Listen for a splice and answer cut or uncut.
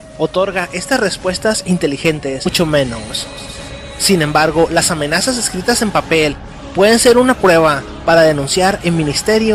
uncut